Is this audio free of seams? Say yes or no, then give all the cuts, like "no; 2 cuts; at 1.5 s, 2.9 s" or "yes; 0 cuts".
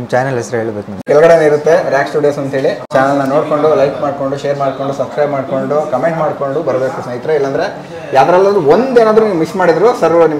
no; 2 cuts; at 1.1 s, 2.8 s